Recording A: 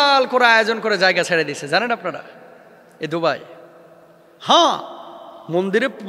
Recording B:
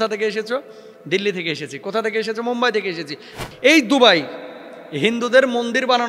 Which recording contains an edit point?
B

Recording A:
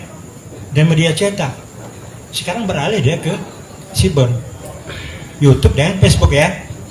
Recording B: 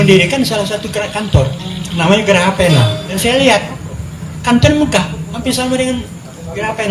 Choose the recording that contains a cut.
B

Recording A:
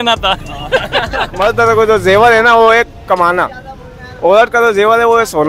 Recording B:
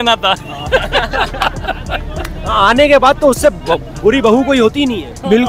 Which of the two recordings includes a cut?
A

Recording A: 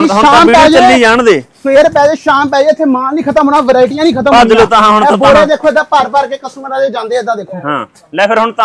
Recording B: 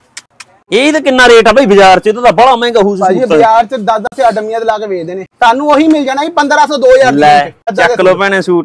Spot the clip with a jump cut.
B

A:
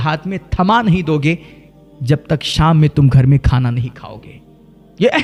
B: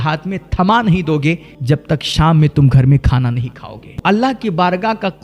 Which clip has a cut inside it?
B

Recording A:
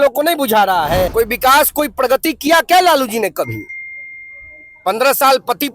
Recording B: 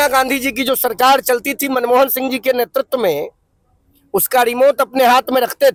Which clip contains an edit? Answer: A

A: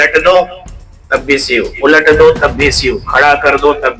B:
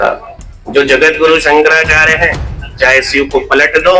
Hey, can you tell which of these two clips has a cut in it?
B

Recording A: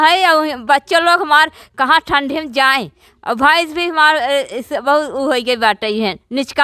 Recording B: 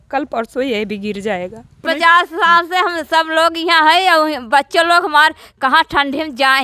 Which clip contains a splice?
B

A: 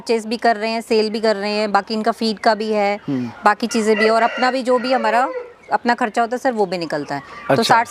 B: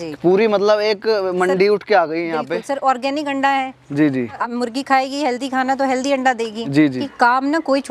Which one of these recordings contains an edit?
B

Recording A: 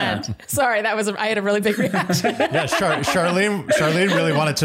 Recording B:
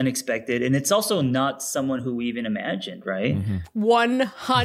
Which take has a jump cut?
B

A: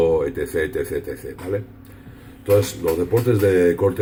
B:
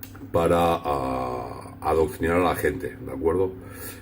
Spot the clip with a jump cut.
B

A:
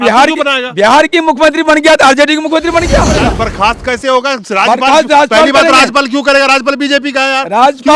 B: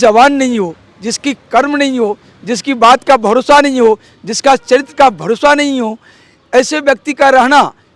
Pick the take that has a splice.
A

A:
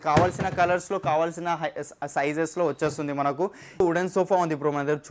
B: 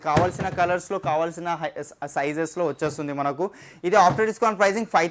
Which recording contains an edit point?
A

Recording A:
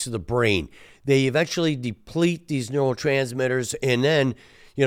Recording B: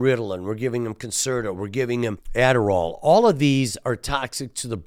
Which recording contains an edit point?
B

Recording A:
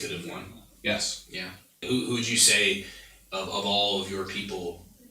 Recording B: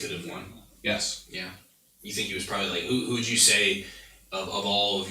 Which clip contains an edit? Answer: A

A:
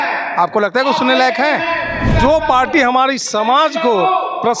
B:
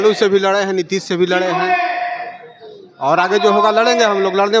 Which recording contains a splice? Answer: A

